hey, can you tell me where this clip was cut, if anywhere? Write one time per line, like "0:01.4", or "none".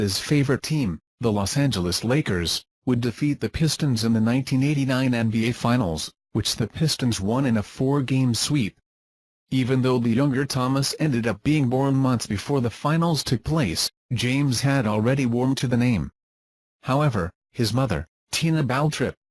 0:03.8